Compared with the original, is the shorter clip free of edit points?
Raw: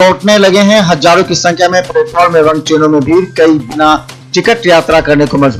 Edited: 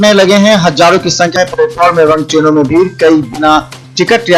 no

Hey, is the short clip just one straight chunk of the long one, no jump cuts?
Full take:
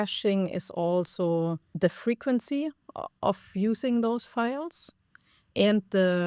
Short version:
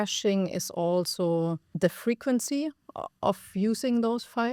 yes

